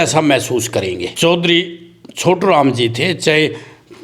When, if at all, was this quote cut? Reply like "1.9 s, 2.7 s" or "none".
1.1 s